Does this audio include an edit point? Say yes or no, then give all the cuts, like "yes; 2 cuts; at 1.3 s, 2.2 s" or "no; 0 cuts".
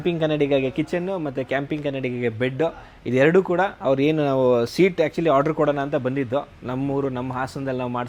no; 0 cuts